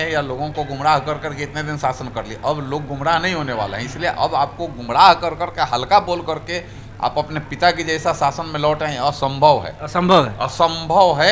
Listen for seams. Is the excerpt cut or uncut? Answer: uncut